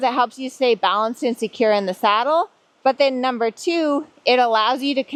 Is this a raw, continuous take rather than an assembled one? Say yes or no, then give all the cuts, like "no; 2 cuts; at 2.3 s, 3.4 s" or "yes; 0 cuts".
yes; 0 cuts